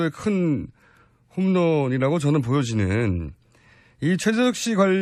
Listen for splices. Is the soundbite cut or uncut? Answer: uncut